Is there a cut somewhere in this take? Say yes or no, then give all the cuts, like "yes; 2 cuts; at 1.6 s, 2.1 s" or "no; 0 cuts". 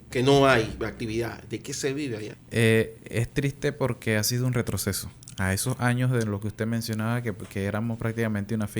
yes; 1 cut; at 2.4 s